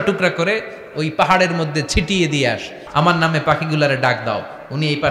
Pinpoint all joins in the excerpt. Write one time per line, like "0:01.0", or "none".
0:02.8